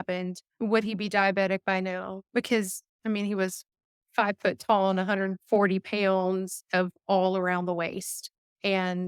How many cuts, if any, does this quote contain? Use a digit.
0